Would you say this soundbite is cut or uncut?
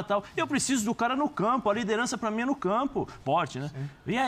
cut